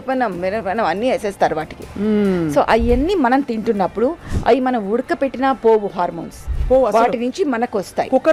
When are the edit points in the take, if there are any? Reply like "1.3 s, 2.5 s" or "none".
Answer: none